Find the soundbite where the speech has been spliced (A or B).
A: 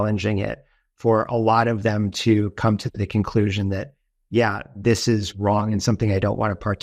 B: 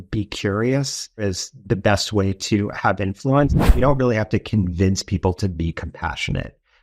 B